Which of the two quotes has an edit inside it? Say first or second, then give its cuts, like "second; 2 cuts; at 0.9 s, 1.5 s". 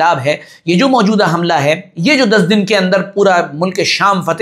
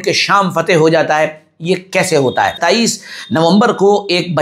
second; 1 cut; at 2.6 s